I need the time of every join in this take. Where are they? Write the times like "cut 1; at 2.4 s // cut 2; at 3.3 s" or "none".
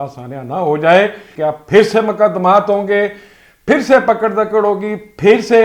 cut 1; at 1.2 s